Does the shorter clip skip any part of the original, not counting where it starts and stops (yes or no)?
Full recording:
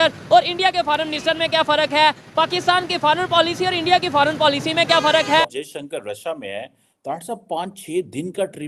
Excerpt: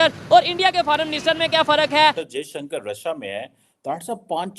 yes